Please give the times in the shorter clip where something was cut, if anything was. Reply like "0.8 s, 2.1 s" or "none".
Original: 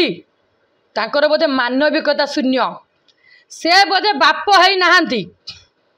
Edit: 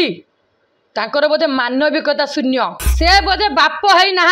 2.8 s